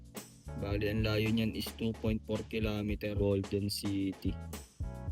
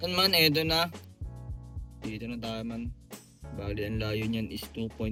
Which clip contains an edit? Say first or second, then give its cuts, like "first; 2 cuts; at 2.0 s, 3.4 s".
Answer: first; 1 cut; at 3.1 s